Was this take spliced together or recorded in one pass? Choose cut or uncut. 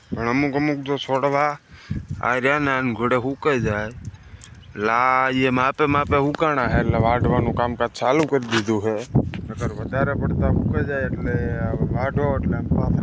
uncut